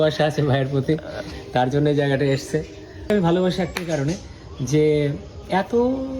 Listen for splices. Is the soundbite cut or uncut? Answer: cut